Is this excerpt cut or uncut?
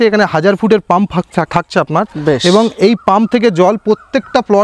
uncut